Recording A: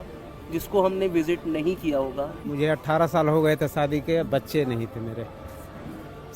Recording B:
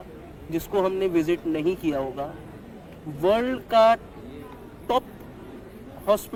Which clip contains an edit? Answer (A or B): A